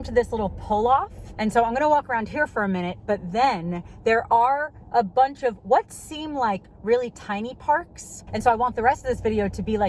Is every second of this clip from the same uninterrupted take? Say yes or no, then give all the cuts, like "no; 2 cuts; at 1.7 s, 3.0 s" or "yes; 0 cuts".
no; 2 cuts; at 1.2 s, 8.2 s